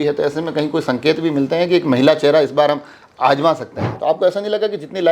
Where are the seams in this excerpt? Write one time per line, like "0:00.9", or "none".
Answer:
0:03.9